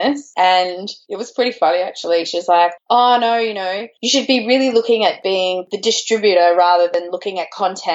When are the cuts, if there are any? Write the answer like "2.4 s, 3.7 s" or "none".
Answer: 5.7 s